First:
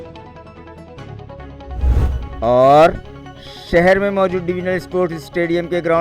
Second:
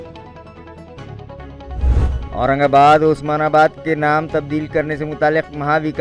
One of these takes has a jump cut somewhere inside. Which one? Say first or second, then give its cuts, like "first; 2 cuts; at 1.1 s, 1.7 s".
second; 1 cut; at 2.0 s